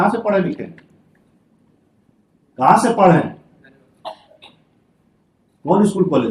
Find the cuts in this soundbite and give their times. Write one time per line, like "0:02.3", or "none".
none